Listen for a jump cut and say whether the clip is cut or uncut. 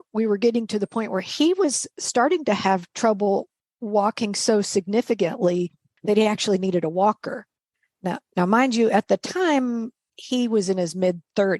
uncut